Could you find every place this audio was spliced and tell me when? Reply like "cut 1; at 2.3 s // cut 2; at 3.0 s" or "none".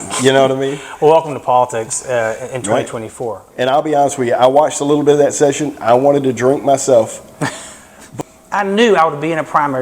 cut 1; at 3.4 s // cut 2; at 8.1 s